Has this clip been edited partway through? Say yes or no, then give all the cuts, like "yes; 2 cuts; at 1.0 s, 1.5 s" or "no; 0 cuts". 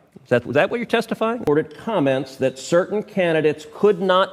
yes; 1 cut; at 1.5 s